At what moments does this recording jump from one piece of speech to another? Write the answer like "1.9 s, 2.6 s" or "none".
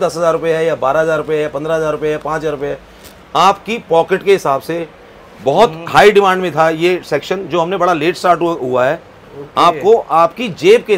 none